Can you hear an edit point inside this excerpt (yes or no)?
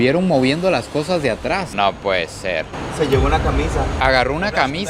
yes